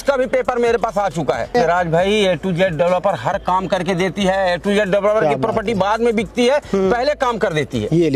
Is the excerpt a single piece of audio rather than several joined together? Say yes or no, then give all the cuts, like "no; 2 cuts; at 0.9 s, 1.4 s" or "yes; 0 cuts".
no; 1 cut; at 1.5 s